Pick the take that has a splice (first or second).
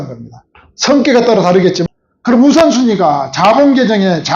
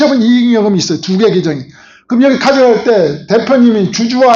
first